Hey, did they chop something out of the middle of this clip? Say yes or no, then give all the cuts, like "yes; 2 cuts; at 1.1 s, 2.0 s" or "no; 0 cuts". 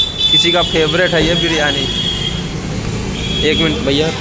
no; 0 cuts